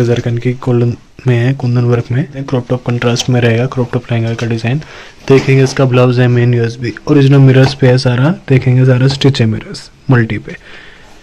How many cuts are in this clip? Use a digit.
1